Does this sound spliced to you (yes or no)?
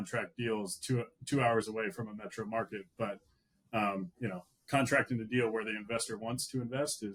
no